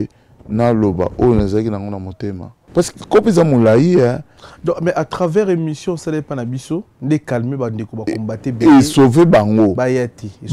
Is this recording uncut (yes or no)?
no